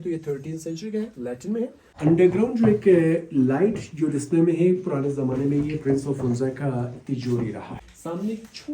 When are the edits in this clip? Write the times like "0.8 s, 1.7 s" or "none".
1.8 s, 7.8 s